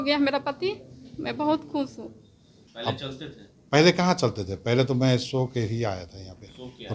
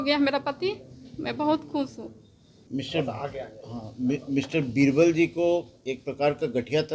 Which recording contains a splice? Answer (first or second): first